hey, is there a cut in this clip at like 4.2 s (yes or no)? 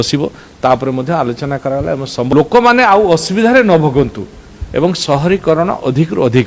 no